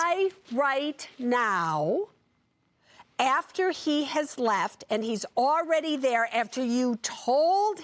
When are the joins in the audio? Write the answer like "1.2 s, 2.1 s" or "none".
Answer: none